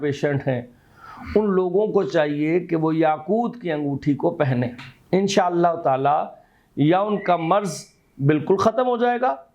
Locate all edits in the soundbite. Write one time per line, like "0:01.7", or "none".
none